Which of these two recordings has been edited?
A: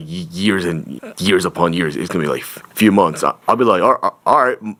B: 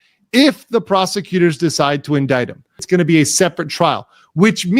B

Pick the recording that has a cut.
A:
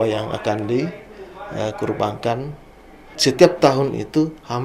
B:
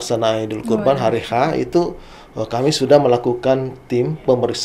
A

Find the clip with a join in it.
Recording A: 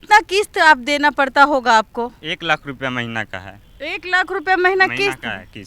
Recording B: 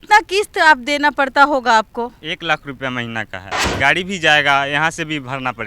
B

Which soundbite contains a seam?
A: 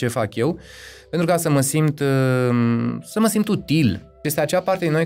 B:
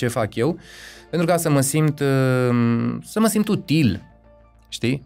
A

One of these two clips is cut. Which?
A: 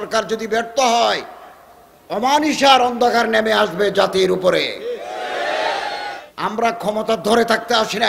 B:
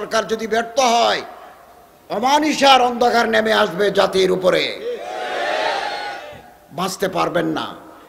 A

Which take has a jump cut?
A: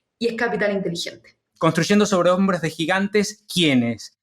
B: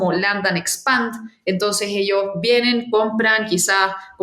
A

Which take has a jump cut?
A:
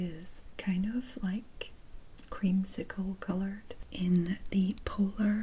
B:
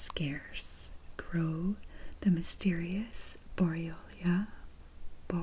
A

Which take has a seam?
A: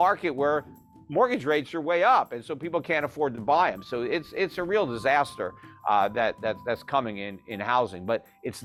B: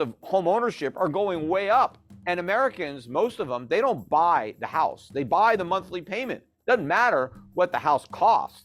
B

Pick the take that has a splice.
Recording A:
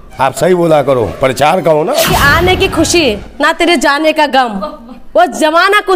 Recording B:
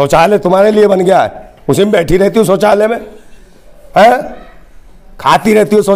A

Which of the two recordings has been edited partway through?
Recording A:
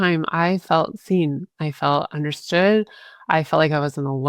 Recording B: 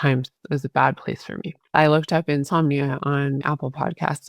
B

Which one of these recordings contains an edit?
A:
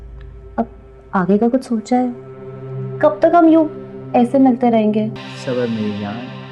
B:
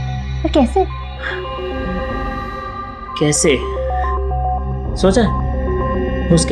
A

